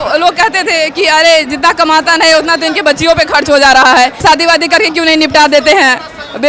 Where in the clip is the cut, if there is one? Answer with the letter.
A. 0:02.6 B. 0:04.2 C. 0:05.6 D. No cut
B